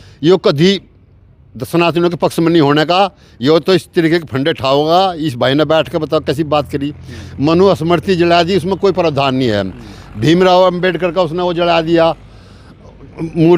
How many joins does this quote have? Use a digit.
0